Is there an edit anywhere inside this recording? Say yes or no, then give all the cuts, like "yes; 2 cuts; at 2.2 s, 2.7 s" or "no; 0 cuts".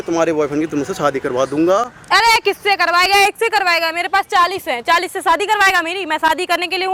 no; 0 cuts